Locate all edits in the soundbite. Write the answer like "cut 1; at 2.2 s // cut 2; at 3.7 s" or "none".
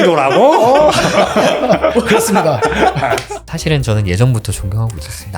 cut 1; at 3.2 s